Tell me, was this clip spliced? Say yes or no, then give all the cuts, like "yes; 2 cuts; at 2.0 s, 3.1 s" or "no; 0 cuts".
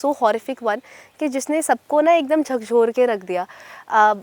no; 0 cuts